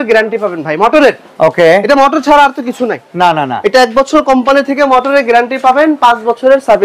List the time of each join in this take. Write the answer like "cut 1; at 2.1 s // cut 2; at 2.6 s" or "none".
none